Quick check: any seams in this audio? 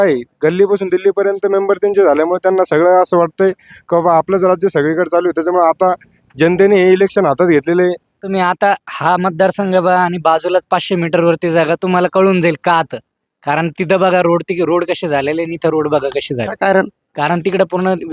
yes; 1 cut; at 8.2 s

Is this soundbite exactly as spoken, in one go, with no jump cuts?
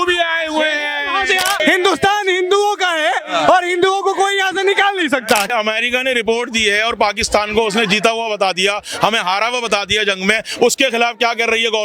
no; 2 cuts; at 1.6 s, 5.5 s

